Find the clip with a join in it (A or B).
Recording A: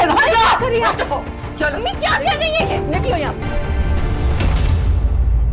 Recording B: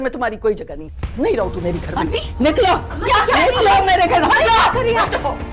A